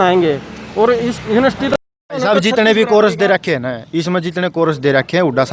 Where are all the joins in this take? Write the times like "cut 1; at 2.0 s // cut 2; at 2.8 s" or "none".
none